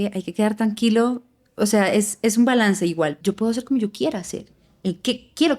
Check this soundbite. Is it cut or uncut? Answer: cut